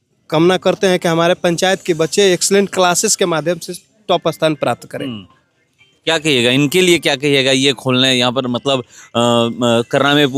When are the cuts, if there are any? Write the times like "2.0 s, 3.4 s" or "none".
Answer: none